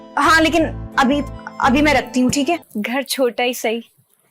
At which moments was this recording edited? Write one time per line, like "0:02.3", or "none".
0:02.7